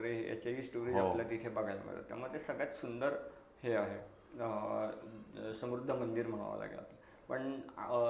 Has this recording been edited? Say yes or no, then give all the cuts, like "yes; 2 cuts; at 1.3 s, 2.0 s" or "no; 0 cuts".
no; 0 cuts